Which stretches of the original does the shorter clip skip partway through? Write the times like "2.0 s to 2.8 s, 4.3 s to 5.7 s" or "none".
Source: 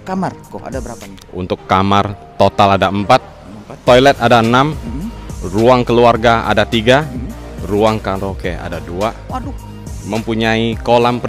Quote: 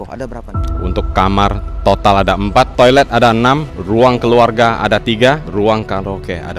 3.2 s to 3.8 s, 4.8 s to 5.4 s, 7.1 s to 7.6 s